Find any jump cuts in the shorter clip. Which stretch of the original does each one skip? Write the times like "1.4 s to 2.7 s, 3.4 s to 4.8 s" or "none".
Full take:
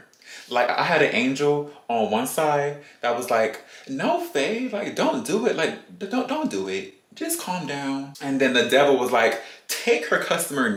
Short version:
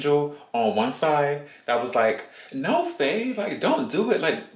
none